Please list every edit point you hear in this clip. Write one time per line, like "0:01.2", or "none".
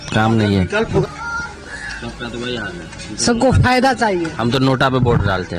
0:01.0